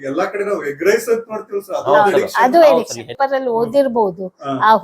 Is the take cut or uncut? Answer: cut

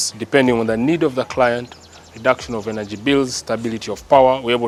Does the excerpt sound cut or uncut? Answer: uncut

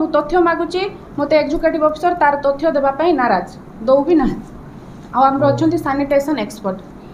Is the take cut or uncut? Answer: uncut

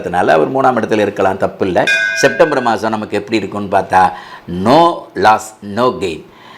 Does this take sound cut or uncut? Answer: cut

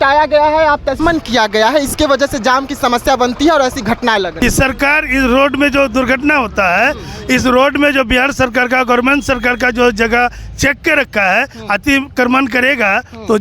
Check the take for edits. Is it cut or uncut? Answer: cut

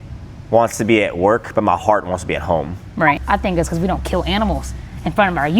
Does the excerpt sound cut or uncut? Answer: cut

